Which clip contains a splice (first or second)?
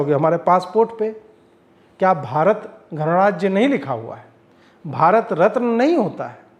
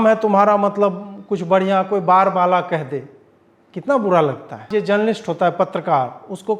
second